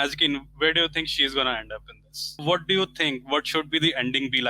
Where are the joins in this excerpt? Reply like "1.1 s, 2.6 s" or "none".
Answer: 2.4 s